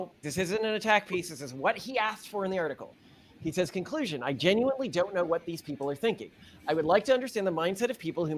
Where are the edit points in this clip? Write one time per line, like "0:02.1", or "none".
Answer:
none